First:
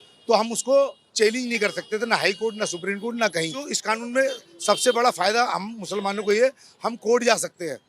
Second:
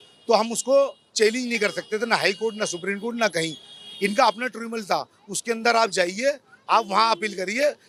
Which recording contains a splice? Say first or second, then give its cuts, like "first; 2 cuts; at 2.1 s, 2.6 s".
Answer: first; 1 cut; at 3.7 s